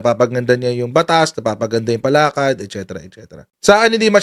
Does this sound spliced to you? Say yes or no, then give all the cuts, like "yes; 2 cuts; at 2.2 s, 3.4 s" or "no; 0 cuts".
no; 0 cuts